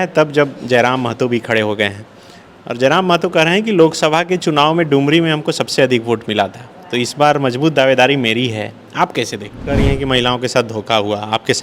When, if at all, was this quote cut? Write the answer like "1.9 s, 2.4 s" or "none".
9.6 s